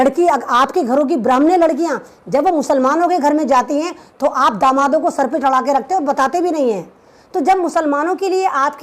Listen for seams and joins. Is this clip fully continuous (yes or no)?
yes